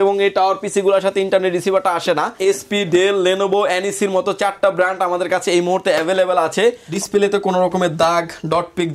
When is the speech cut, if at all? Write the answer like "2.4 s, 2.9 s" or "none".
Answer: 2.3 s, 6.9 s